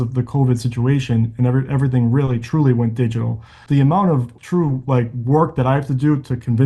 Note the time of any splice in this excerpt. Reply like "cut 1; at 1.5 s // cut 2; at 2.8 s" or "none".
cut 1; at 3.6 s // cut 2; at 4.3 s